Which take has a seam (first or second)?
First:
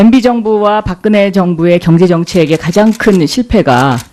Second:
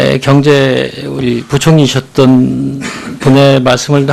first